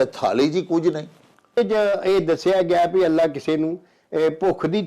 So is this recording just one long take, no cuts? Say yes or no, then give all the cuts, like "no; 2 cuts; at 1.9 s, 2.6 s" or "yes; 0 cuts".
no; 1 cut; at 1.6 s